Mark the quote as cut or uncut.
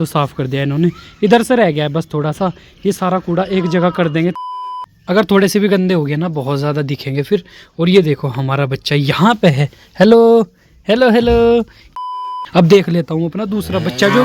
cut